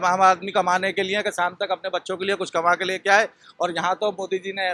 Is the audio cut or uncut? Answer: uncut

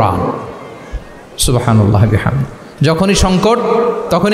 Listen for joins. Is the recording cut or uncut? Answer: uncut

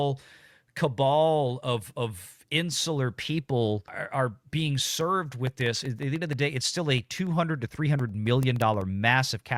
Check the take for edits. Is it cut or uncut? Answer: uncut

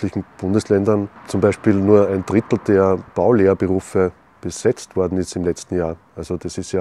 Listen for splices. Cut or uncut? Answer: cut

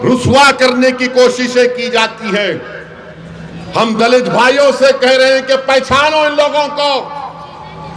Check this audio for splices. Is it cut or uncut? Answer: uncut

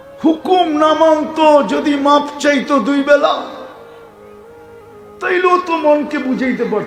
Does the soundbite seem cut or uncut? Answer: uncut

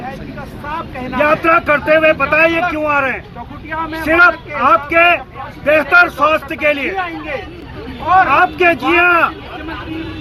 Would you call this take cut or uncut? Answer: uncut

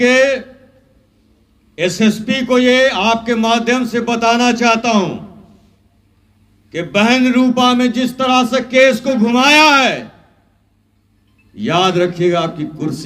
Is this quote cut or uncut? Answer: uncut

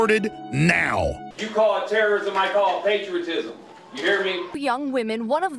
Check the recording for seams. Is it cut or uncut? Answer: cut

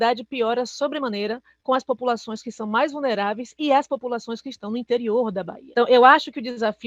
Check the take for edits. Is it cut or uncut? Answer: cut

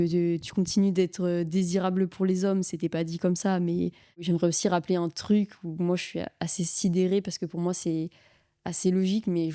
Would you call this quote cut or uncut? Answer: cut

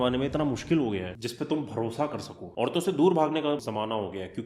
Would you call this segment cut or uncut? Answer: cut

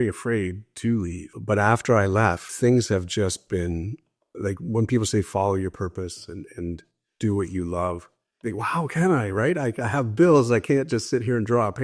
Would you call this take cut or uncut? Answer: cut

